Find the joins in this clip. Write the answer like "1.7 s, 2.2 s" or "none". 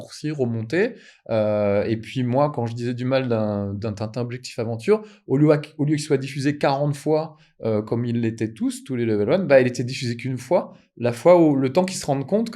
none